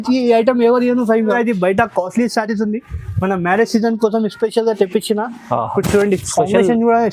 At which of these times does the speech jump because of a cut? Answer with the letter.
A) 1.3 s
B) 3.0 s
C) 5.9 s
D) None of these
A